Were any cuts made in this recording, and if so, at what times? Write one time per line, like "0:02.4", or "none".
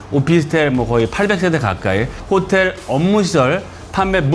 0:02.2